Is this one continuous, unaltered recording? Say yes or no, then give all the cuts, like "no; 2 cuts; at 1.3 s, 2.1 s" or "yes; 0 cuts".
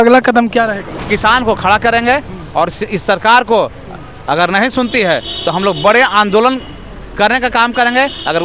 no; 1 cut; at 1.1 s